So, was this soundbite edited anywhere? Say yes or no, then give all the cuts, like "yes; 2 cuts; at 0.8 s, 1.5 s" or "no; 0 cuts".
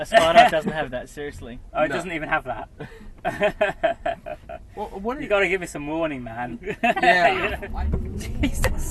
yes; 1 cut; at 7.6 s